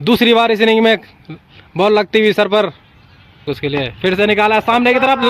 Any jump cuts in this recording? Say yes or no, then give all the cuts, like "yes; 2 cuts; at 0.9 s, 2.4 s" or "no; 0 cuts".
yes; 1 cut; at 3.4 s